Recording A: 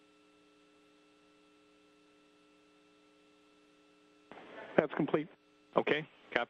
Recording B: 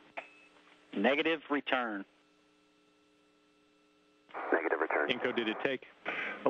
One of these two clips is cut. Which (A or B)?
B